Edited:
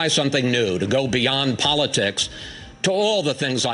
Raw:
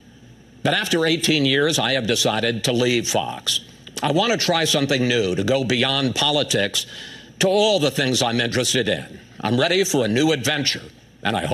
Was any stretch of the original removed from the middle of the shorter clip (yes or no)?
no